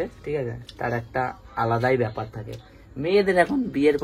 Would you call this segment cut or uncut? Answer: uncut